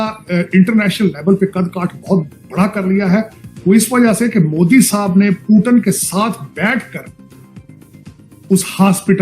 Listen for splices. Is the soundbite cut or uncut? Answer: cut